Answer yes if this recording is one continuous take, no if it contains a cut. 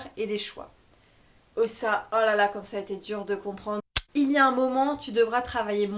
no